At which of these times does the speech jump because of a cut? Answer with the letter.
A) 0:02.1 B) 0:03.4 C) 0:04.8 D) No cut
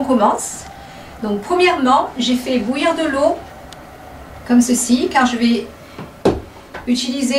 C